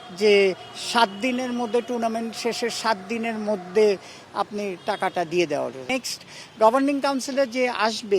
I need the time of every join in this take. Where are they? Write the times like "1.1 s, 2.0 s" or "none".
5.9 s